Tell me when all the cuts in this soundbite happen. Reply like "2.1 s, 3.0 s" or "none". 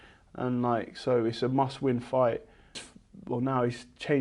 2.8 s